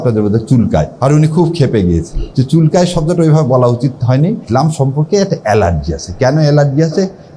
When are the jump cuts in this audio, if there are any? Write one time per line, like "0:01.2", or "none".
0:00.9
0:02.2
0:04.4